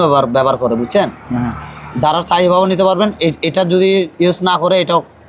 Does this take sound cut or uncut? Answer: uncut